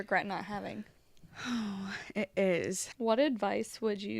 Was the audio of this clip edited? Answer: yes; 1 cut; at 2.9 s

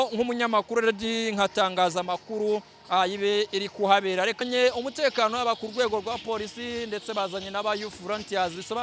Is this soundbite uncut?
no; 1 cut; at 4.4 s

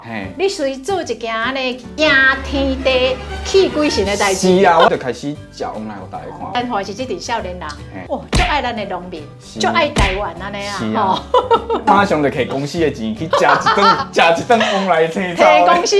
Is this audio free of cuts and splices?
no; 4 cuts; at 1.9 s, 4.9 s, 6.6 s, 7.9 s

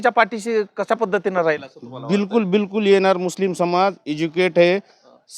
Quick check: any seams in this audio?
no; 0 cuts

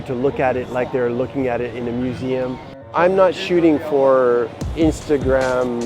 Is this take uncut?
no; 2 cuts; at 2.9 s, 4.6 s

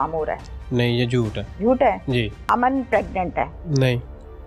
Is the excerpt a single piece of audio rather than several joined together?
no; 3 cuts; at 1.4 s, 2.4 s, 3.6 s

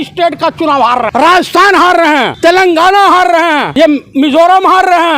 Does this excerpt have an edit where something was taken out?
yes; 3 cuts; at 1.1 s, 2.3 s, 3.7 s

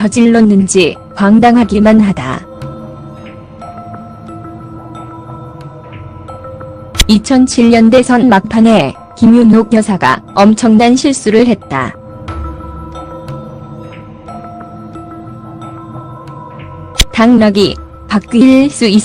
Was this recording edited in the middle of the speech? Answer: yes; 1 cut; at 12.8 s

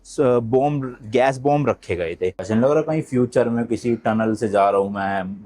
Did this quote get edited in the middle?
yes; 1 cut; at 2.5 s

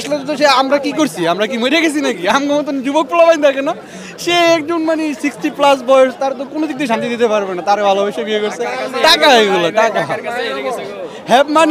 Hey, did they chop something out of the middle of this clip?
no; 0 cuts

